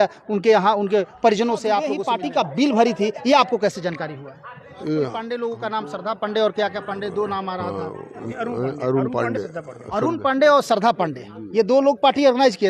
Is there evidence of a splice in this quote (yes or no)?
yes